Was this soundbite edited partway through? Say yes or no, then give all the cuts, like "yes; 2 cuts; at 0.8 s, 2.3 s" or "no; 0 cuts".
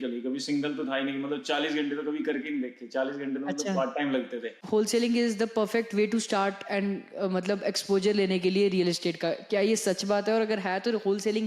yes; 1 cut; at 4.6 s